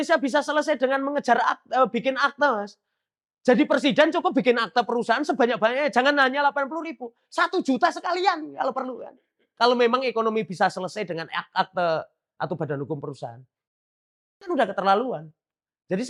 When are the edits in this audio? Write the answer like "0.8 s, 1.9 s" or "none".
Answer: none